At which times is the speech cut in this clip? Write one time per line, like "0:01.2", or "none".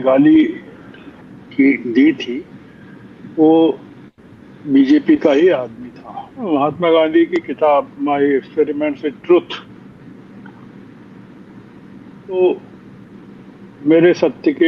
0:06.5